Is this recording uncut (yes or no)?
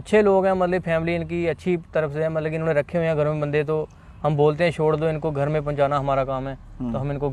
yes